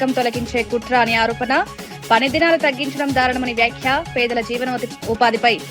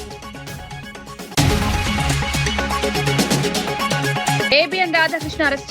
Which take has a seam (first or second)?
second